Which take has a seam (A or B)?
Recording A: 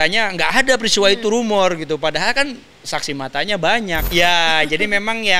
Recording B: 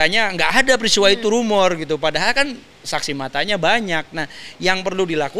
A